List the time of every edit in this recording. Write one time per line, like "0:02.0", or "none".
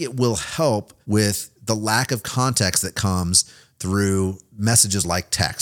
0:00.9
0:04.5